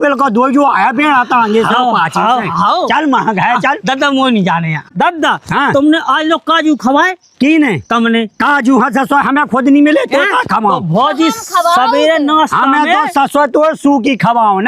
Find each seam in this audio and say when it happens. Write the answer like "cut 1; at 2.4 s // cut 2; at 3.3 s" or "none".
cut 1; at 4.9 s